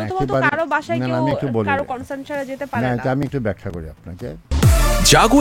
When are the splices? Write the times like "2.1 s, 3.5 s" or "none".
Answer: 4.5 s